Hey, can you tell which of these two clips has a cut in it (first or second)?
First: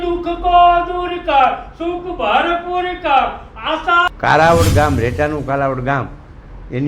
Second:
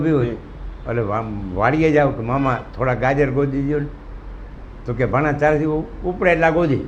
first